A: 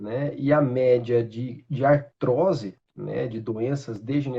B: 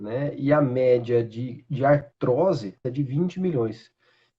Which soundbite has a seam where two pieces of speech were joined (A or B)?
B